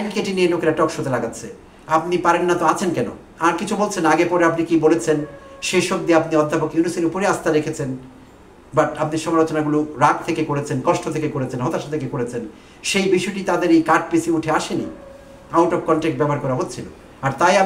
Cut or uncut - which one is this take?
uncut